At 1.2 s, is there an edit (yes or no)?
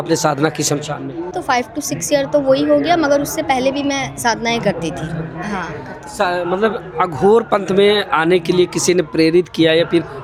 no